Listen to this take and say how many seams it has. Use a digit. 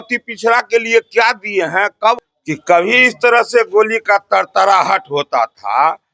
1